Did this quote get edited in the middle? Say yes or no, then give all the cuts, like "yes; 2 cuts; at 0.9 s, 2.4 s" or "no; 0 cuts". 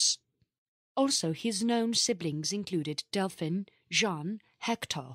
no; 0 cuts